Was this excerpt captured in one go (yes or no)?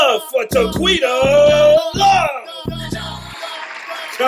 yes